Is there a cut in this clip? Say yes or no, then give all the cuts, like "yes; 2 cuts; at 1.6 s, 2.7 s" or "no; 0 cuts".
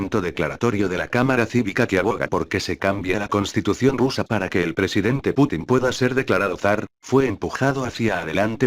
yes; 1 cut; at 3.3 s